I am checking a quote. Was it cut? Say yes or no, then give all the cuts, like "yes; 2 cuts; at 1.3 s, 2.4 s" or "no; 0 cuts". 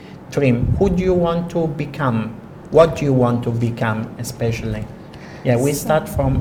no; 0 cuts